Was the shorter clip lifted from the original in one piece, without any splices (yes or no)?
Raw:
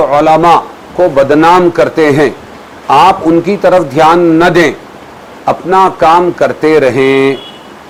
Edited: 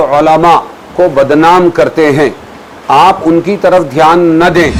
yes